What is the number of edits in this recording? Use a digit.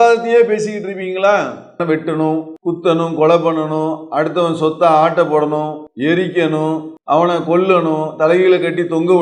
4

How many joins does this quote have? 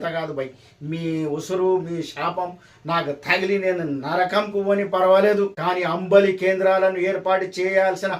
1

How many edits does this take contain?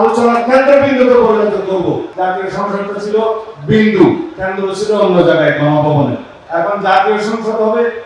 2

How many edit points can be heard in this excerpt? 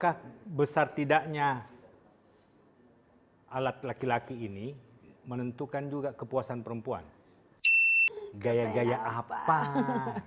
1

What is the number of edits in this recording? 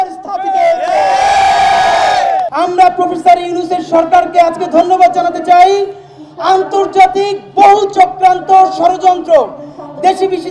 1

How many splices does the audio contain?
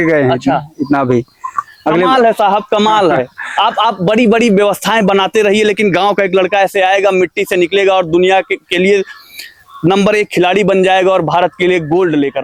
0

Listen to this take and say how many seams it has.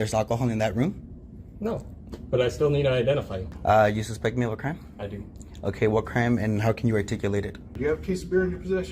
2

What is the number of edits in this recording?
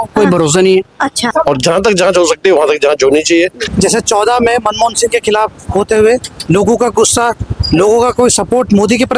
2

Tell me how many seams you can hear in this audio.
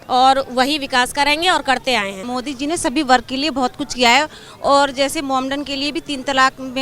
1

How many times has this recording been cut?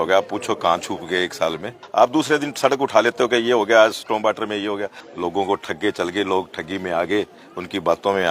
2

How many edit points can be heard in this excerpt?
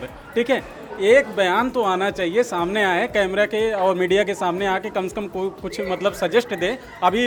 0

